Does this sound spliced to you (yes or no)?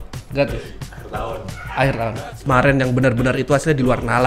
yes